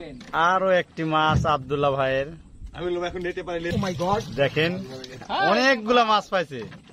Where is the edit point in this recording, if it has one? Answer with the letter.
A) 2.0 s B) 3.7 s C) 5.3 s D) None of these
B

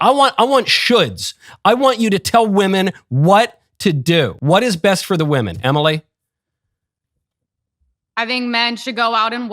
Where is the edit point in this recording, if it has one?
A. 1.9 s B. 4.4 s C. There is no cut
B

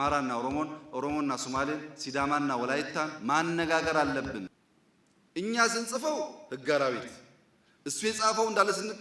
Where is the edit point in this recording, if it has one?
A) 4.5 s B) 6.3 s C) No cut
A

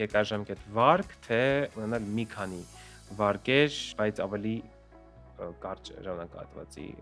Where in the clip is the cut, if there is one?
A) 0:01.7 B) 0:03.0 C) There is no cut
A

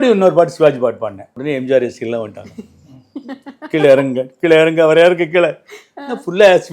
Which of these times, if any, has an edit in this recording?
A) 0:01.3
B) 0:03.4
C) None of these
A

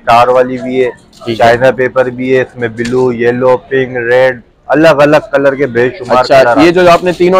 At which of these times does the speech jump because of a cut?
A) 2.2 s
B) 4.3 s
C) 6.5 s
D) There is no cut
D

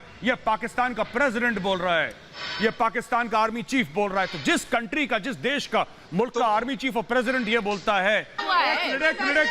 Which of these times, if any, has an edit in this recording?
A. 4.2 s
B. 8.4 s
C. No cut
B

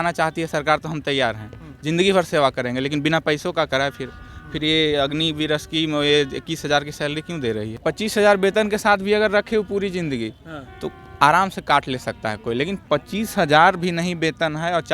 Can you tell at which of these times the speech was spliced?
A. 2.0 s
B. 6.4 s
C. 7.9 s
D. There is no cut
C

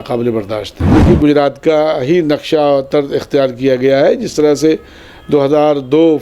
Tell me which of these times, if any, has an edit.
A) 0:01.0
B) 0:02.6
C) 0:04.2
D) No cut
A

